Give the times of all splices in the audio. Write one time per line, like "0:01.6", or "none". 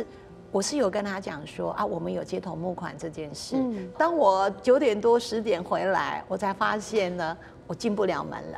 0:03.9